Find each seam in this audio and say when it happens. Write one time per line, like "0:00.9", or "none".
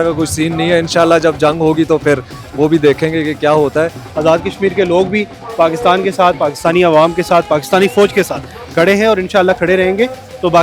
0:04.0